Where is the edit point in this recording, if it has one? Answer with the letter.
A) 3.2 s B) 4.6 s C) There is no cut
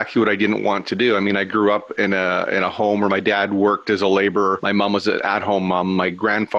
B